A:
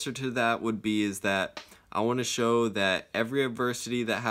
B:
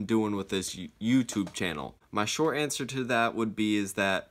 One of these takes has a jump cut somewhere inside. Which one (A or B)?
B